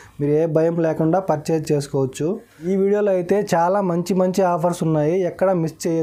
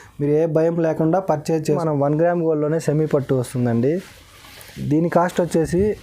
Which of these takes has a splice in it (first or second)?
second